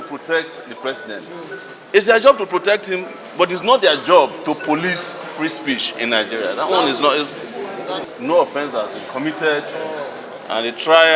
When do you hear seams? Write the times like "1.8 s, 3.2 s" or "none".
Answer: 8.1 s